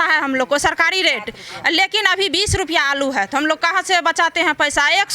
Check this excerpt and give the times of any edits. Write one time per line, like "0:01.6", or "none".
none